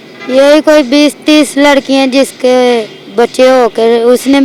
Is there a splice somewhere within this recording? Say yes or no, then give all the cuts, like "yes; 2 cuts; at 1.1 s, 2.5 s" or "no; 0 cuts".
no; 0 cuts